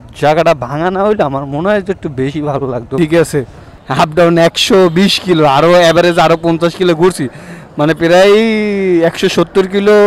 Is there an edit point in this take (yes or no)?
yes